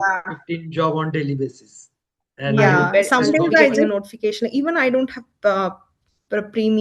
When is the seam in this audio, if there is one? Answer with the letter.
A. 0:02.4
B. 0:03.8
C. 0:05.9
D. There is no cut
B